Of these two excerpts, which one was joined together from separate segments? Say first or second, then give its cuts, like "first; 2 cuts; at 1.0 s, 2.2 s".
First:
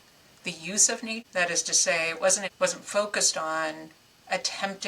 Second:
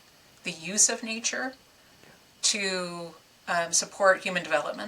first; 2 cuts; at 1.2 s, 2.5 s